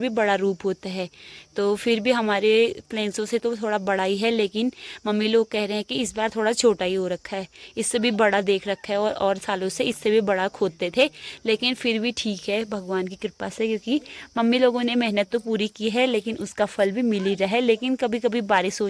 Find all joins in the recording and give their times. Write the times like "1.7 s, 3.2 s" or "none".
none